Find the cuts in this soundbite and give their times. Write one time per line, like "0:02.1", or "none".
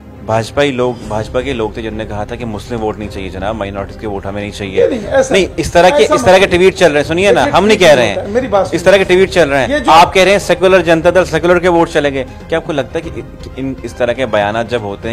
none